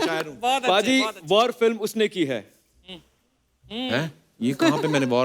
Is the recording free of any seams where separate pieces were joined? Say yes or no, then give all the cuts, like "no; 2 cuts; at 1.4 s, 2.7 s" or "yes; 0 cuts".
yes; 0 cuts